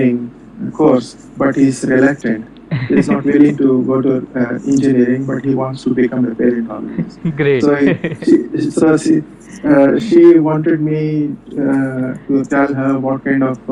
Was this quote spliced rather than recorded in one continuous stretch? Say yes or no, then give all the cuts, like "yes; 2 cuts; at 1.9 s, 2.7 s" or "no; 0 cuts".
no; 0 cuts